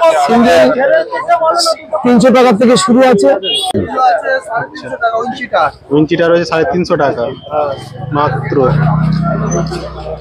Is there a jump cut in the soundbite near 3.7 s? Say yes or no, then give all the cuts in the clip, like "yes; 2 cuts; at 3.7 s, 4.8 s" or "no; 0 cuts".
yes; 1 cut; at 3.7 s